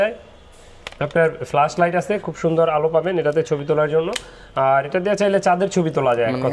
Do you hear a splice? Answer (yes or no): no